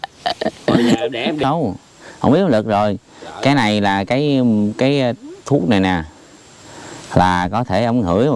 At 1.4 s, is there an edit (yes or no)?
yes